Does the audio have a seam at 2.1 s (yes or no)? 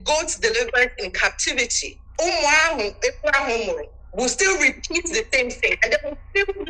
yes